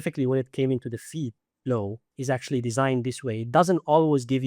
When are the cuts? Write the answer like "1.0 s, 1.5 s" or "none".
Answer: 1.5 s, 2.1 s